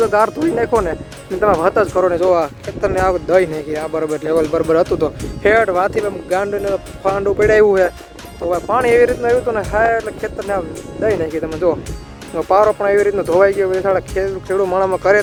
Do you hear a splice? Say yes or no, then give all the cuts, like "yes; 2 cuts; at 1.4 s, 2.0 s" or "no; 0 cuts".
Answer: no; 0 cuts